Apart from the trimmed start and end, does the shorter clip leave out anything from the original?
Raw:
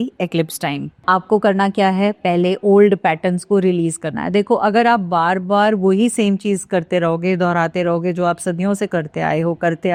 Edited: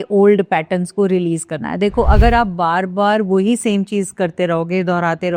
no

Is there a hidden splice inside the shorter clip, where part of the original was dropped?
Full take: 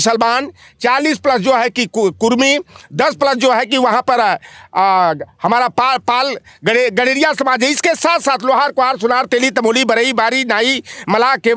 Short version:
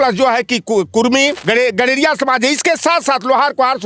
yes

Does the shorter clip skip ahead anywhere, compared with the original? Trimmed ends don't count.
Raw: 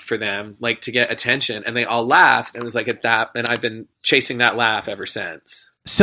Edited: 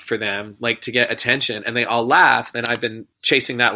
yes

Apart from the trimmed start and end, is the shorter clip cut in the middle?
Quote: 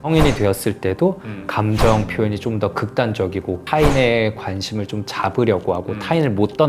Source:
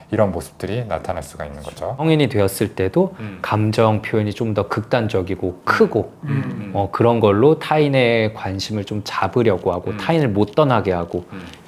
yes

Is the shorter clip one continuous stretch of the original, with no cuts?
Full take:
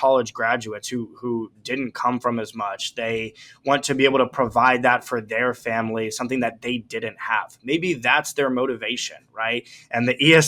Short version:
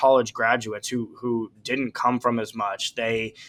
yes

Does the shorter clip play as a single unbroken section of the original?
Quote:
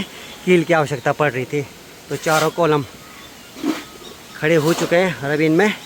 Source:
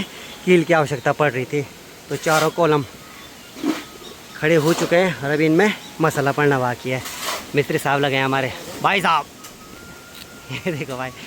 yes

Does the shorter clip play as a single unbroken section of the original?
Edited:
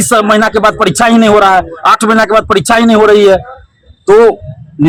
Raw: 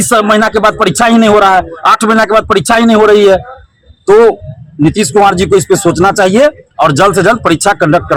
yes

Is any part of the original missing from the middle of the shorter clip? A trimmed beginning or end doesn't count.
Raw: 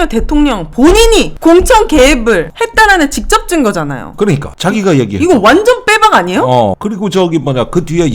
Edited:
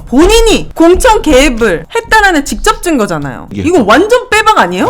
yes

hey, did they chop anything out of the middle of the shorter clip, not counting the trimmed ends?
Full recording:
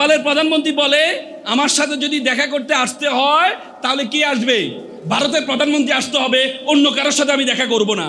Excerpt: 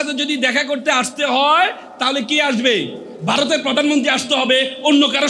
no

